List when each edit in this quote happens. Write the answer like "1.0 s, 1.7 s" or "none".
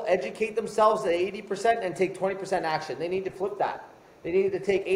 none